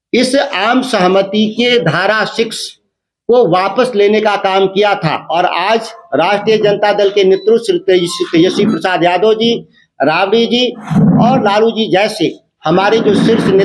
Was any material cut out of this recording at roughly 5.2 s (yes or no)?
yes